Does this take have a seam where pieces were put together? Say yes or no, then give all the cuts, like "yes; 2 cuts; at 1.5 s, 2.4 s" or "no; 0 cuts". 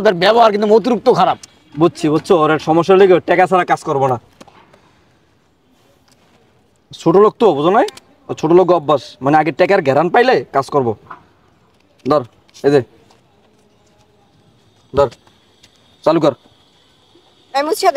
no; 0 cuts